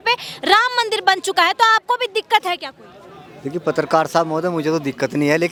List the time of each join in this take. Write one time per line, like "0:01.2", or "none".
none